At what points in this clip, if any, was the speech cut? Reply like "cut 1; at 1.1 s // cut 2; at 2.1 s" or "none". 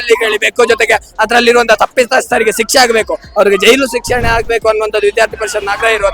none